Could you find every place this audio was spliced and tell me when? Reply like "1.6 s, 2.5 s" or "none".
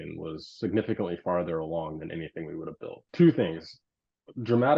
3.0 s